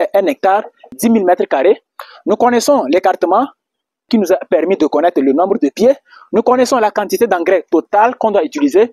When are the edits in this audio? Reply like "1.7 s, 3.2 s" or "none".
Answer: 0.9 s, 4.1 s